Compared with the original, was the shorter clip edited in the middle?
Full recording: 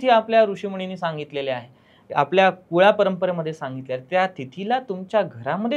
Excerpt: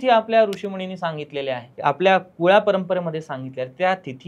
yes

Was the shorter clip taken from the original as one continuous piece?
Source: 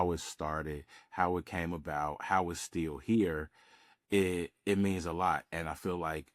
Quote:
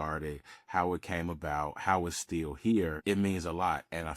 no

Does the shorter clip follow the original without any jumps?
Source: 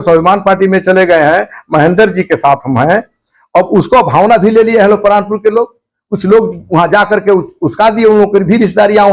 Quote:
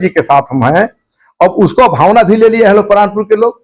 yes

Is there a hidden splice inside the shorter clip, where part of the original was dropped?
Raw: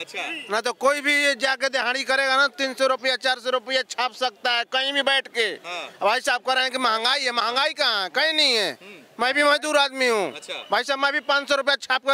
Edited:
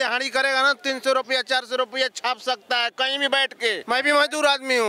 yes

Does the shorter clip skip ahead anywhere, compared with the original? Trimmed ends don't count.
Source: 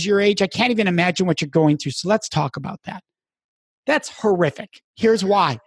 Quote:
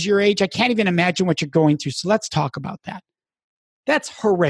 no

